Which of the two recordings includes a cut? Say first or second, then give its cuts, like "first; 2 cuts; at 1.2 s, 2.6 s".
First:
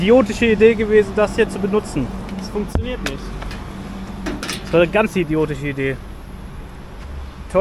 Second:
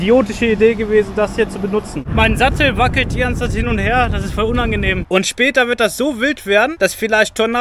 second; 3 cuts; at 2.0 s, 5.0 s, 6.7 s